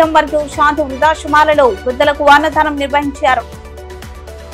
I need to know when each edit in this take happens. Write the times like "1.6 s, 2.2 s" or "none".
3.5 s